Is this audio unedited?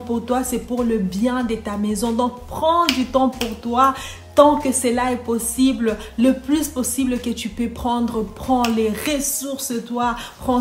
yes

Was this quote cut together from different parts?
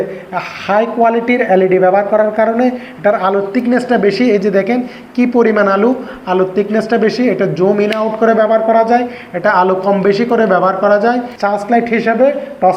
yes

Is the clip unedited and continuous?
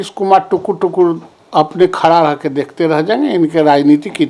yes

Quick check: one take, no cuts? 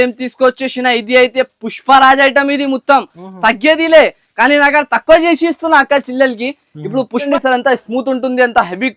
no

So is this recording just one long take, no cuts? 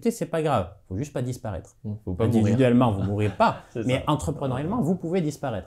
yes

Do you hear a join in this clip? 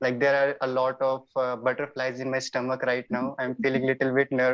no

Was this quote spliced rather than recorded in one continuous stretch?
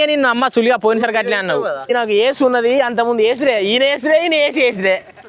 yes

